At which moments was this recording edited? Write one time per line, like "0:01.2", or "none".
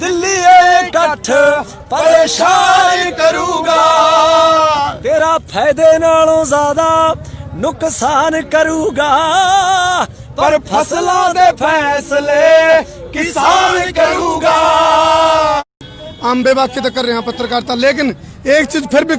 0:15.8